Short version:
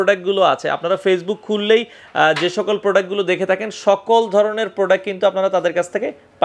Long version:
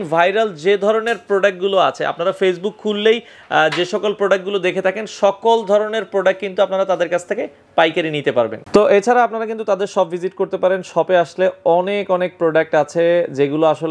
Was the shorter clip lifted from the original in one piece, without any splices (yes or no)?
yes